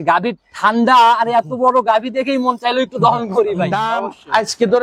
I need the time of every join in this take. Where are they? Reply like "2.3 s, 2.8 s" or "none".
3.8 s